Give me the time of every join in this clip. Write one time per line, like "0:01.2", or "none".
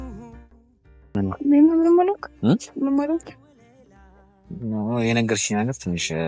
0:01.1

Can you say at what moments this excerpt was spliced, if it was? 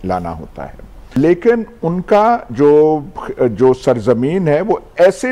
0:00.9

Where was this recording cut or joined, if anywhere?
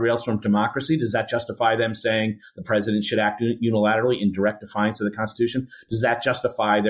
none

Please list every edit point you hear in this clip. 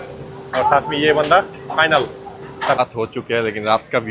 0:02.8

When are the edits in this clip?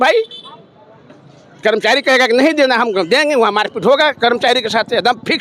none

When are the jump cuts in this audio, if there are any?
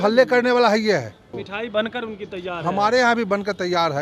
0:01.4

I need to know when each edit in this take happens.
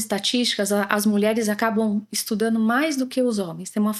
none

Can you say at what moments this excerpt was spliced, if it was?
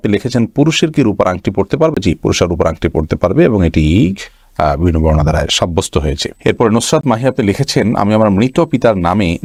none

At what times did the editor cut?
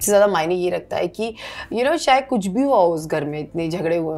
none

